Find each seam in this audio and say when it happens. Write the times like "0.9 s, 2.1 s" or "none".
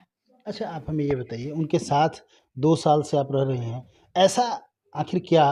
none

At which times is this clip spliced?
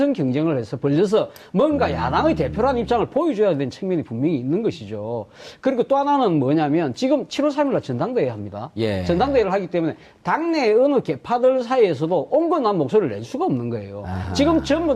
8.1 s

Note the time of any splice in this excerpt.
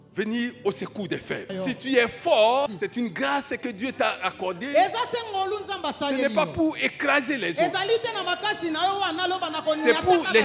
1.5 s, 2.7 s

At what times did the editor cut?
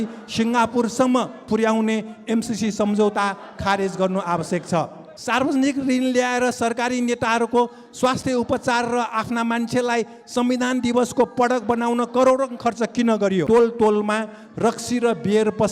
5.1 s, 13.5 s

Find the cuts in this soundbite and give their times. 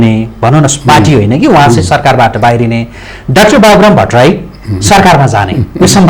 none

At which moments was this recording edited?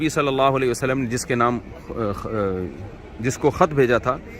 none

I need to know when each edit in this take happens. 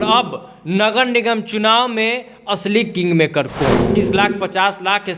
3.9 s

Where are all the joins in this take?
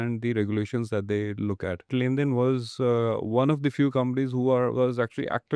1.9 s

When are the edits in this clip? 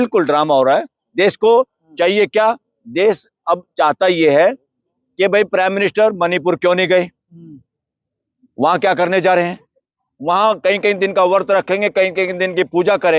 none

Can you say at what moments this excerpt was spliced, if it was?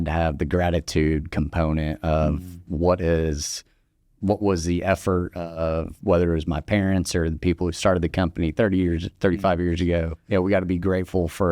10.2 s

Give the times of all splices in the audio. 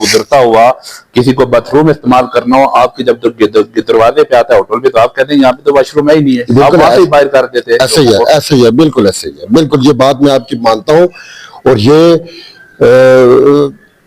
none

